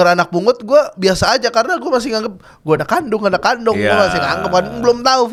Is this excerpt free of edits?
yes; 0 cuts

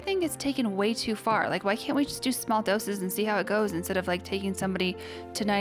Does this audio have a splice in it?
no; 0 cuts

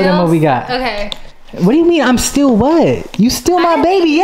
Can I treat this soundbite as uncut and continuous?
yes; 0 cuts

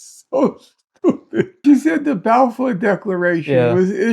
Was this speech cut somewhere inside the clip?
yes; 1 cut; at 1.5 s

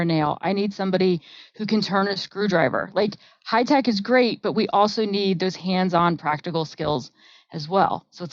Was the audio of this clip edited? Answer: no; 0 cuts

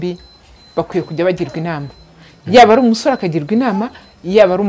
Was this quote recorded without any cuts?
yes; 0 cuts

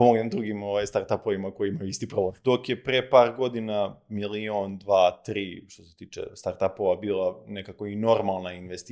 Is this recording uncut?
no; 1 cut; at 2.4 s

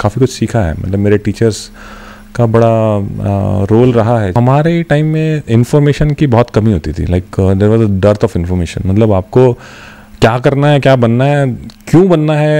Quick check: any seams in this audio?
yes; 1 cut; at 4.3 s

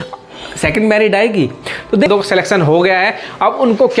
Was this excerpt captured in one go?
no; 1 cut; at 2.1 s

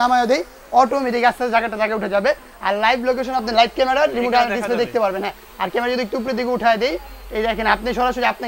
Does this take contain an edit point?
no; 0 cuts

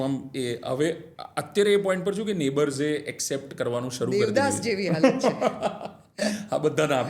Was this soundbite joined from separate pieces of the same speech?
no; 0 cuts

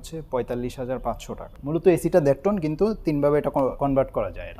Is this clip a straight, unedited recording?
no; 2 cuts; at 1.5 s, 3.8 s

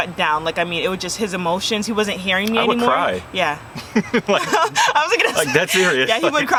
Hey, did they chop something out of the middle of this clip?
no; 0 cuts

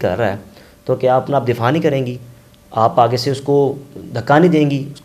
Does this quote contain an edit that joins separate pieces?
no; 0 cuts

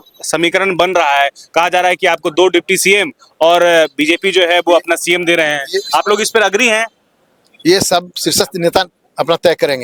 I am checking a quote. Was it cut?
no; 0 cuts

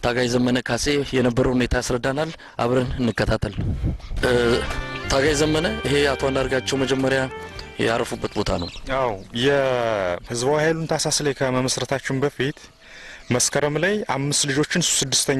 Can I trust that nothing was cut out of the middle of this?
no; 1 cut; at 4.1 s

